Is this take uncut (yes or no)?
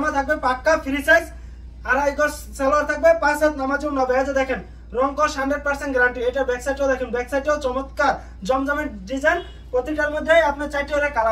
yes